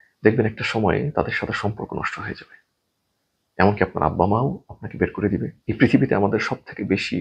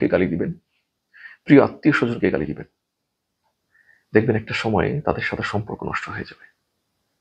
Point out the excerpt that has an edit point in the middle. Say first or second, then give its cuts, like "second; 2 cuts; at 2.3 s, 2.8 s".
first; 1 cut; at 5.6 s